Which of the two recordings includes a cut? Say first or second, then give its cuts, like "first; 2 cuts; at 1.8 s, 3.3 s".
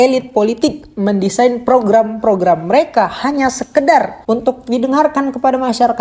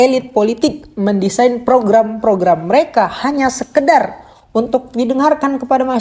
first; 1 cut; at 4.1 s